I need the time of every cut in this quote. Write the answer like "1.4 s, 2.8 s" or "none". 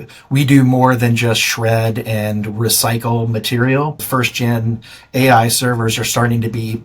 4.0 s

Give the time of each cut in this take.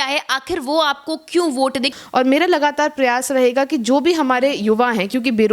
1.9 s

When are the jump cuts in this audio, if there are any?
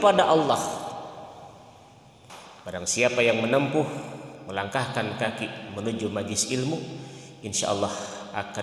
2.4 s

